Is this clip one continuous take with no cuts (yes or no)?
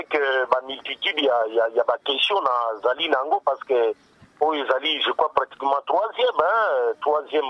yes